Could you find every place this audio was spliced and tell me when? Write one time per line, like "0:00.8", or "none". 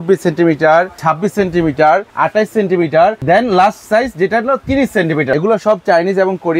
0:03.2
0:05.3